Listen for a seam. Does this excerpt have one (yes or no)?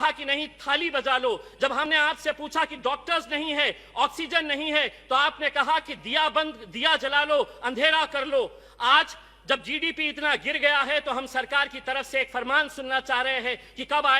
no